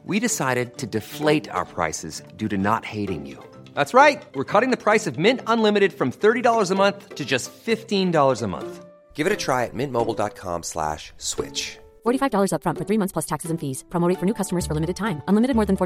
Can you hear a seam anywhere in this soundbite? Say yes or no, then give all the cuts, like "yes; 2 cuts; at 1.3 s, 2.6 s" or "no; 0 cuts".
no; 0 cuts